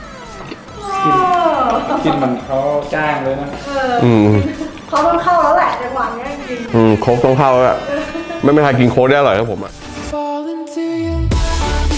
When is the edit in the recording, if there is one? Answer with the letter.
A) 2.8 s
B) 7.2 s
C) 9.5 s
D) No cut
C